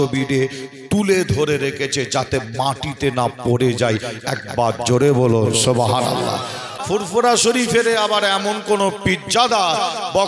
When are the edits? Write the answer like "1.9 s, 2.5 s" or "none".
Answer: 6.7 s